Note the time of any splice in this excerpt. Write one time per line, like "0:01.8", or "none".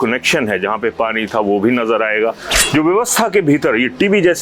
0:02.5